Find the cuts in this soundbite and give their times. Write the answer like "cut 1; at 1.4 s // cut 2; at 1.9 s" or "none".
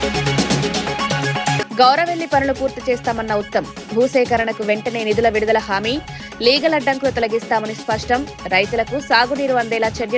none